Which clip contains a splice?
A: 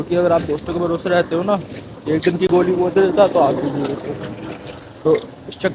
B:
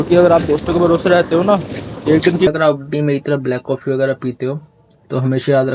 B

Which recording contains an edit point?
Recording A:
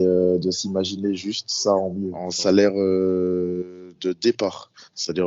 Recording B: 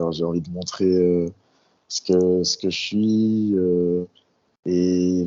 A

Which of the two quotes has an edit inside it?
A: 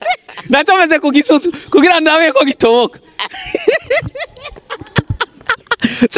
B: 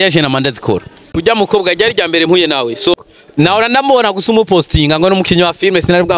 B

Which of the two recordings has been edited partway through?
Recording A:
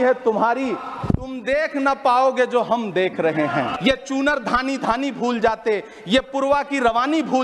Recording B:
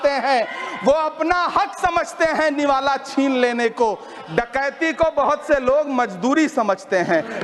A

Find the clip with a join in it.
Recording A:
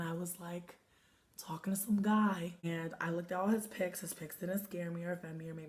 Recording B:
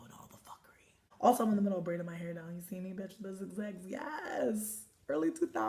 A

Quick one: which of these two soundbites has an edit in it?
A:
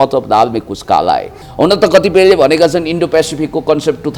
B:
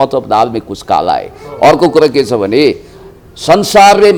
A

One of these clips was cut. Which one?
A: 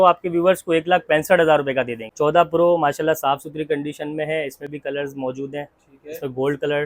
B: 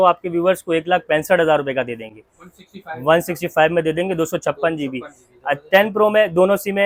A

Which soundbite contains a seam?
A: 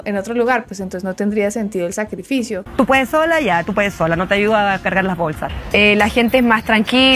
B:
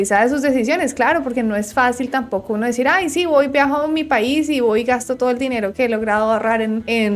A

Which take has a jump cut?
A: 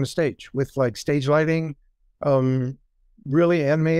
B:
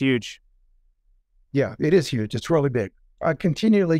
B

